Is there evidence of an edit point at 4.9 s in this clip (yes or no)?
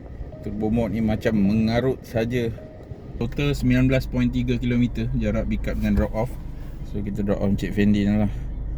no